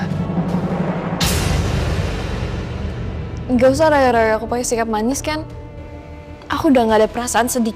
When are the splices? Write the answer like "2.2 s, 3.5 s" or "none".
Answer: none